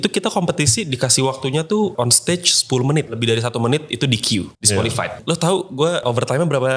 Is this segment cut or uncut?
cut